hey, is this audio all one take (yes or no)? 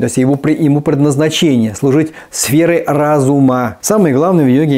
no